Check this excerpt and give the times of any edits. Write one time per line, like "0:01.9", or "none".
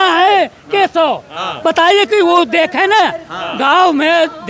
none

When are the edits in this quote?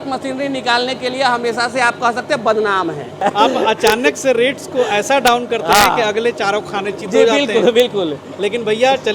0:03.2

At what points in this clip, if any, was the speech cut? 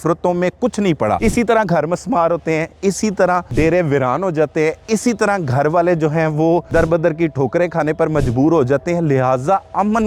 0:01.2
0:03.5
0:06.7

